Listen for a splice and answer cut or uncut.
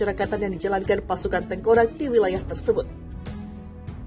uncut